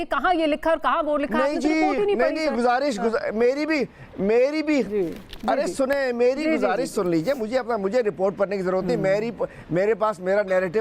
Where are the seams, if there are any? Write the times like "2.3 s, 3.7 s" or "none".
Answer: none

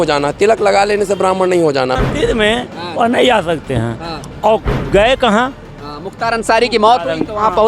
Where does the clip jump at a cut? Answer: 2.0 s

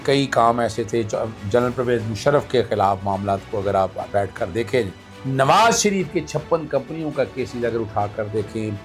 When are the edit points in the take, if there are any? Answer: none

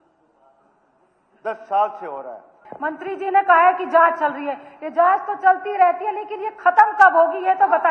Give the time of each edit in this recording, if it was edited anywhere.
2.6 s

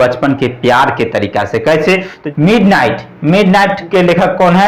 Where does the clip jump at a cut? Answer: 2.2 s, 3.9 s

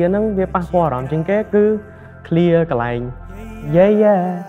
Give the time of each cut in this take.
none

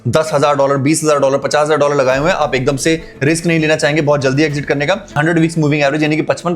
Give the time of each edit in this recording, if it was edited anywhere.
5.1 s

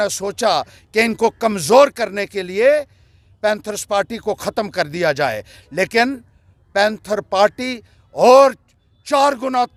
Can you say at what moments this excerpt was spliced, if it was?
none

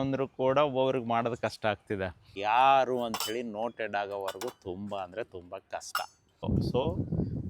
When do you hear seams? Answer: 2.3 s, 6.4 s

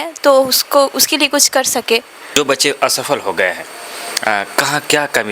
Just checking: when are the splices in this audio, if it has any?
2.4 s

